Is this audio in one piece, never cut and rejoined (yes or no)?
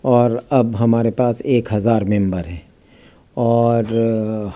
yes